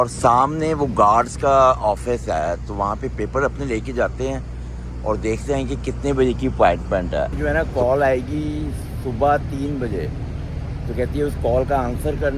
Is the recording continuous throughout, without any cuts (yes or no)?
no